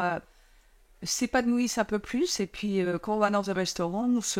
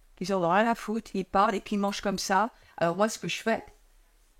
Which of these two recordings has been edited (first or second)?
second